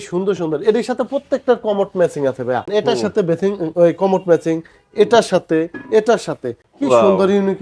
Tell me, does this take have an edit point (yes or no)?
yes